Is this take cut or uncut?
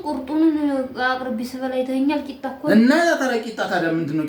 uncut